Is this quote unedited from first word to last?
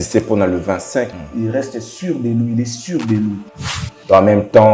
no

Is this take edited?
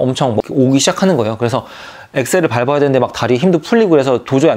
no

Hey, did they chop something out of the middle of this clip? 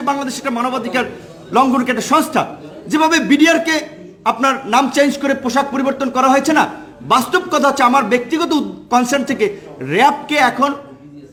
no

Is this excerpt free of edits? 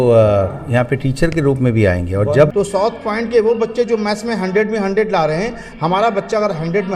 no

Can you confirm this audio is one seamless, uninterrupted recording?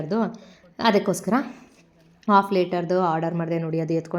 yes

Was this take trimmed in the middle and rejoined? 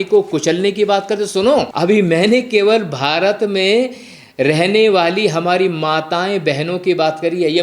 yes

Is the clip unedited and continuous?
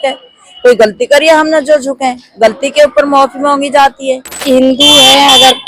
no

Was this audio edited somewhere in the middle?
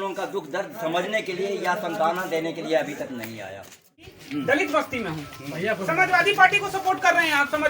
yes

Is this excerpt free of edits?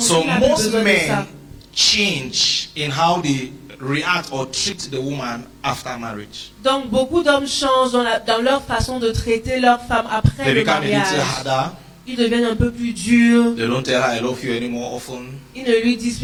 yes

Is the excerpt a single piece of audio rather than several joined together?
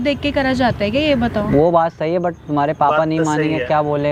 yes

